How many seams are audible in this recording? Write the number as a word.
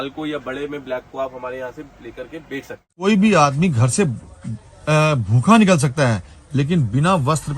one